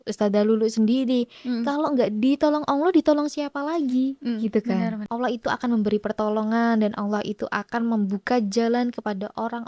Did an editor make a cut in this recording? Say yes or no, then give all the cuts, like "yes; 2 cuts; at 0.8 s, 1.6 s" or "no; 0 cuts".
yes; 1 cut; at 5.0 s